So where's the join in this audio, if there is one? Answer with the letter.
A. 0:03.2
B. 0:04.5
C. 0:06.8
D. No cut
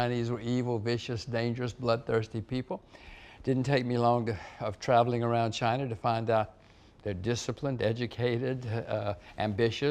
D